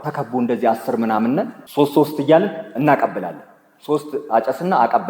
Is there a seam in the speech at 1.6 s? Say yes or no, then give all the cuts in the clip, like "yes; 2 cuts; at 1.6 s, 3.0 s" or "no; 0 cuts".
yes; 1 cut; at 1.6 s